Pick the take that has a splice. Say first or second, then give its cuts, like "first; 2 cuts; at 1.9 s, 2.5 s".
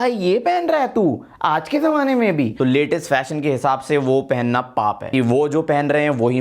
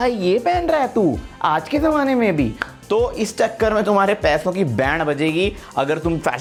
first; 2 cuts; at 2.5 s, 5.1 s